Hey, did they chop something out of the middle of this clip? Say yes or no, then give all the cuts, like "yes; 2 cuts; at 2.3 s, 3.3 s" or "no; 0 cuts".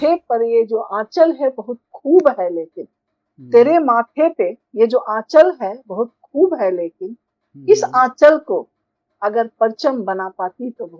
no; 0 cuts